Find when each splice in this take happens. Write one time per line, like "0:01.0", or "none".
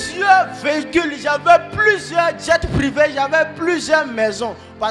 none